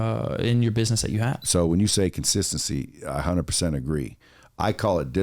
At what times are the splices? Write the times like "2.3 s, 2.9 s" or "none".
1.4 s